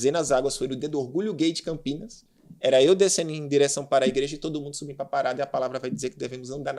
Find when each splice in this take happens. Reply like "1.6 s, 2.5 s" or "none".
none